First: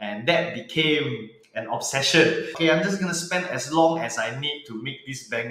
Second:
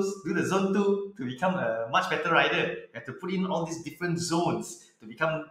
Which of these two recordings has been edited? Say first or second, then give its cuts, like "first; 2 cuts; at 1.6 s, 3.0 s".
first; 1 cut; at 2.5 s